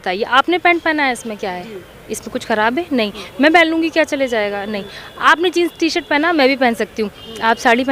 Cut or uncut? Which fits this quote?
uncut